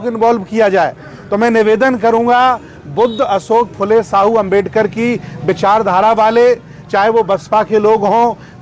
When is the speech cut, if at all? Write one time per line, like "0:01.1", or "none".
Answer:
none